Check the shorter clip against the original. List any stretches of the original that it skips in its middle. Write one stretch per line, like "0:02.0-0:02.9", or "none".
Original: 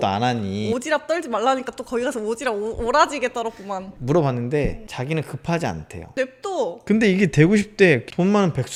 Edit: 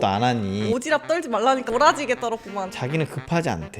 0:01.7-0:02.8
0:03.9-0:04.9